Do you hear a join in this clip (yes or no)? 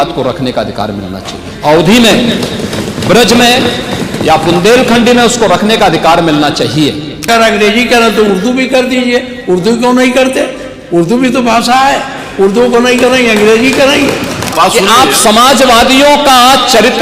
yes